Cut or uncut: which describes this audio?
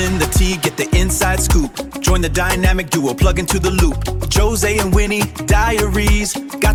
uncut